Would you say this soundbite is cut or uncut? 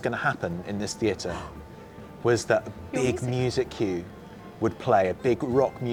uncut